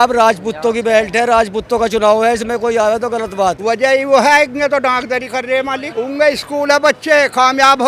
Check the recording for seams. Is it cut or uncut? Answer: cut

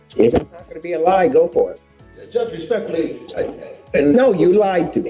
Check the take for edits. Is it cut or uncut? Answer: uncut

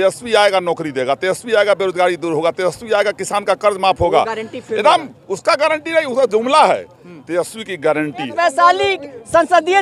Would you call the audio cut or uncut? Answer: cut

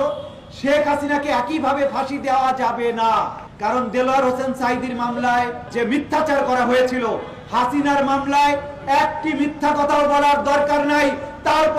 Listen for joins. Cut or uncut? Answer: cut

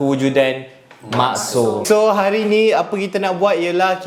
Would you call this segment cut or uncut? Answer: cut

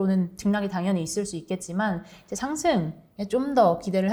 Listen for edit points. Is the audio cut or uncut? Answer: uncut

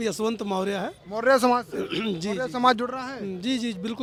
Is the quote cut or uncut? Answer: uncut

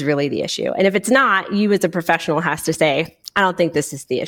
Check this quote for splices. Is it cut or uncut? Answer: uncut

